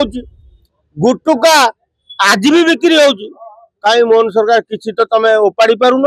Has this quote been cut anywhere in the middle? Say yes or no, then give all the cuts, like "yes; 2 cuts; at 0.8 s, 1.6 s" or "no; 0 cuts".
no; 0 cuts